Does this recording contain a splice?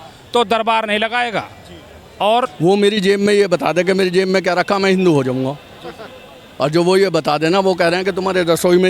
yes; 1 cut; at 2.5 s

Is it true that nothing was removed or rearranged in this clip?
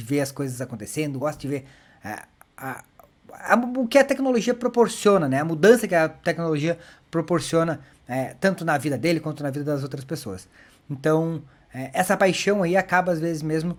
yes; 0 cuts

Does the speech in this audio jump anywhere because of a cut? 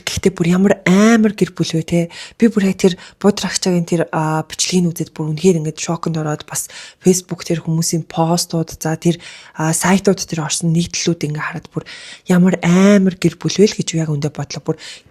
no; 0 cuts

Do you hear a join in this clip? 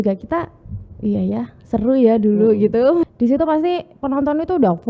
yes; 1 cut; at 3.1 s

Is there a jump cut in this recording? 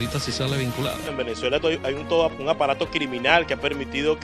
yes; 1 cut; at 1.0 s

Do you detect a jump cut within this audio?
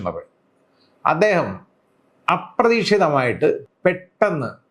yes; 1 cut; at 3.6 s

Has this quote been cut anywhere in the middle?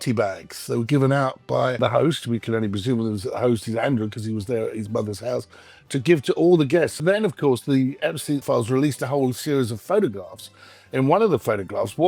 yes; 3 cuts; at 1.8 s, 7.0 s, 8.4 s

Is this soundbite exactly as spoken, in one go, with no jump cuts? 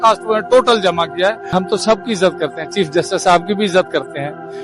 no; 1 cut; at 1.5 s

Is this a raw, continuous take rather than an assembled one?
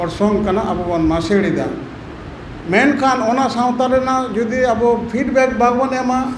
yes; 0 cuts

